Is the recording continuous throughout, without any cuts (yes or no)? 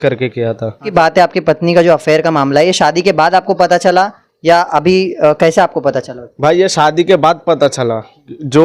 no